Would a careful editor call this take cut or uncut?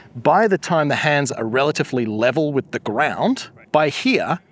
cut